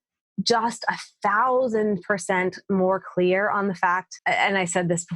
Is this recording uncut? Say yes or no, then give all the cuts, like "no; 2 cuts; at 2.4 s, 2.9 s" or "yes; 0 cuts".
no; 1 cut; at 4.1 s